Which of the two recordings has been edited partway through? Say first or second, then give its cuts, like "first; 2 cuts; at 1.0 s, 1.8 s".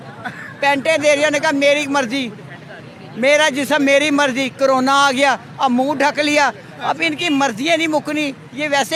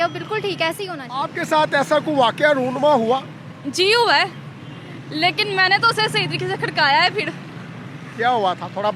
second; 1 cut; at 1.0 s